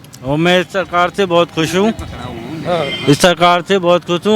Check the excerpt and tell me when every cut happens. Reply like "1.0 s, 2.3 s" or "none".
none